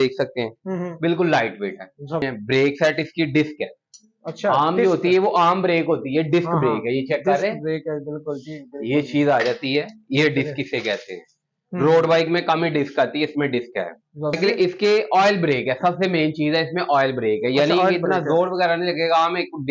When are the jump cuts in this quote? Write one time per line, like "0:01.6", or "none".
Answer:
0:02.2
0:14.4